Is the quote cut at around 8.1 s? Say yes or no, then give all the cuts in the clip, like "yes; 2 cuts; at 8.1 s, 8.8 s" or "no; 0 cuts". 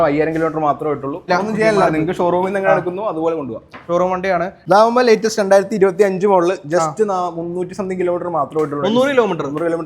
no; 2 cuts; at 1.3 s, 4.5 s